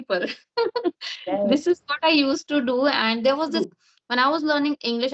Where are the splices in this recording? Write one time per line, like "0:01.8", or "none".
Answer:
0:03.6